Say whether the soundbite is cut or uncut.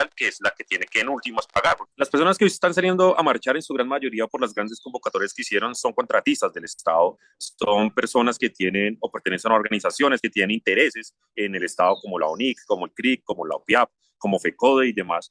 cut